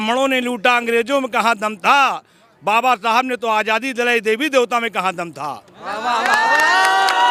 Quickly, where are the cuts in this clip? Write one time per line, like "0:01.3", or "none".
none